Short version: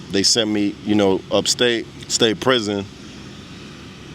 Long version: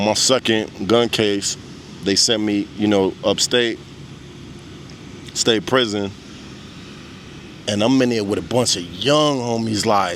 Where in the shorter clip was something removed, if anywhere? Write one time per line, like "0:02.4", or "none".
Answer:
0:02.0